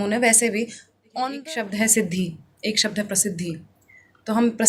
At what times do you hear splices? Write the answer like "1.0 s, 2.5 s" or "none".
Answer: 1.3 s